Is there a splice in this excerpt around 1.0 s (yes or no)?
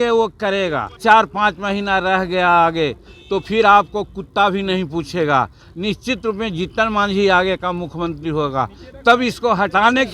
yes